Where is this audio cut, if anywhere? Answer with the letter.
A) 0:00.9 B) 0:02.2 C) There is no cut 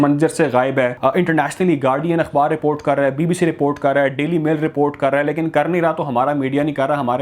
A